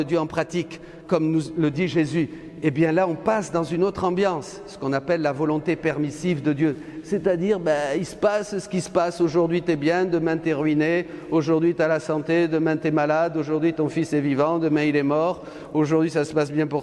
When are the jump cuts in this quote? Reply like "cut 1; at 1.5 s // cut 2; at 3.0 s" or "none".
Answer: none